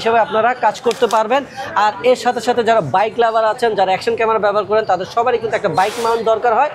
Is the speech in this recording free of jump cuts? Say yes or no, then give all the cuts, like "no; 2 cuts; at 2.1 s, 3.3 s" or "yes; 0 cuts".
yes; 0 cuts